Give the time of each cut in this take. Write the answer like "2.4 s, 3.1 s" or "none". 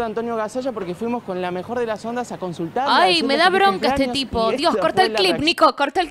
none